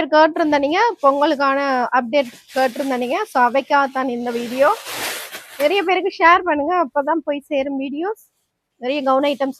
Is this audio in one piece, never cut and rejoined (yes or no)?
yes